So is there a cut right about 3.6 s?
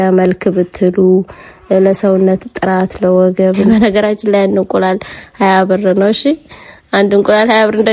yes; 1 cut; at 3.6 s

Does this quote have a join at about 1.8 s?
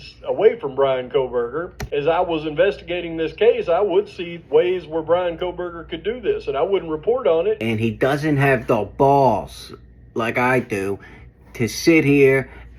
yes; 2 cuts; at 1.8 s, 7.6 s

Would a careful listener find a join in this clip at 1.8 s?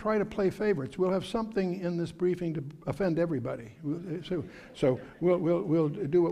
no; 1 cut; at 3.7 s

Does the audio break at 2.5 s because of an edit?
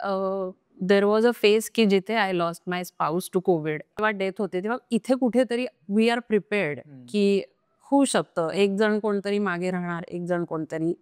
no; 1 cut; at 4.0 s

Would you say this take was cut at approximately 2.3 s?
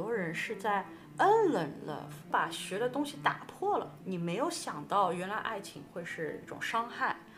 yes; 2 cuts; at 2.3 s, 4.0 s

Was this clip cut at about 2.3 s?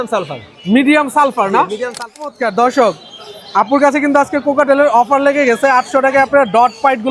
yes; 1 cut; at 2.3 s

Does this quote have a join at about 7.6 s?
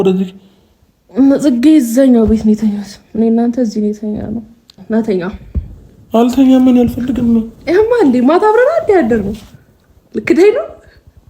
no; 1 cut; at 4.7 s

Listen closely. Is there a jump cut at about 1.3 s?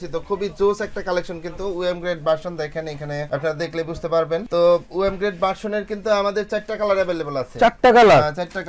no; 0 cuts

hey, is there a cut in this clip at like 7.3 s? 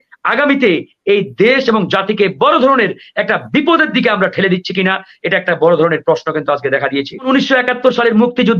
yes; 1 cut; at 7.3 s

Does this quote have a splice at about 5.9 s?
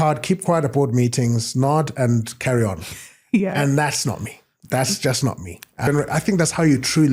yes; 1 cut; at 5.9 s

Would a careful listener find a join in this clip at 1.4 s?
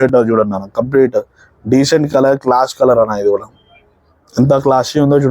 yes; 1 cut; at 1.4 s

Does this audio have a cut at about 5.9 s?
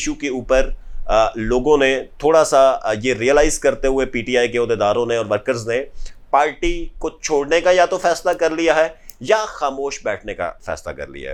no; 0 cuts

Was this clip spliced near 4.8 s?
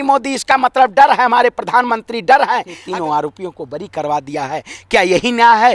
no; 1 cut; at 2.7 s

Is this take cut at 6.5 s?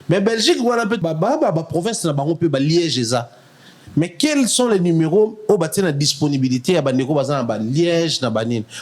no; 1 cut; at 1.0 s

